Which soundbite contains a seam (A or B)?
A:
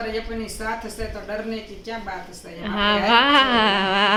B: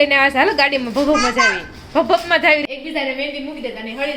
B